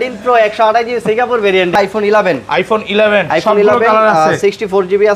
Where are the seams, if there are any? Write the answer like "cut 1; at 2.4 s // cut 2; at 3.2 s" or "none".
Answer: cut 1; at 1.8 s